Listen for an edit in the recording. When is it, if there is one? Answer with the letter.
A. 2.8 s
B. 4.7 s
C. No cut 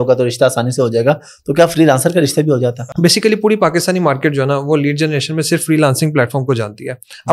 A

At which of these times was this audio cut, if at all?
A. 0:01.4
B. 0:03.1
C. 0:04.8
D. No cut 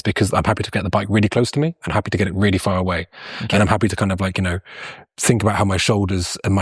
D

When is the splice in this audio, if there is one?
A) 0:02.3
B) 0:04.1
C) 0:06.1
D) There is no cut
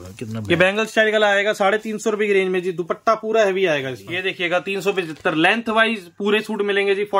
B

